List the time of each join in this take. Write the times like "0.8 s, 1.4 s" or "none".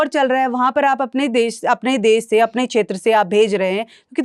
none